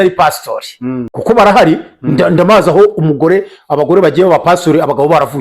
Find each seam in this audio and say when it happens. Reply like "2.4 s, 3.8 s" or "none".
1.1 s